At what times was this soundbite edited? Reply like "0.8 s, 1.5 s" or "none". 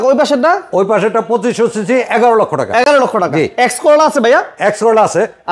none